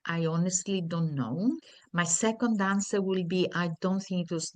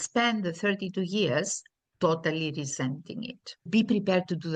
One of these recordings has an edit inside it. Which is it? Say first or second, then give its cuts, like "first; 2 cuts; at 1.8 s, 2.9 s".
second; 1 cut; at 3.7 s